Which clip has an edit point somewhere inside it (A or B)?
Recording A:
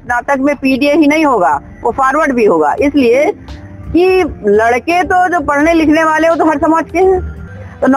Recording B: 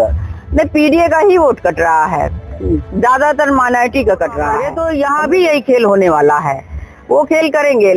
B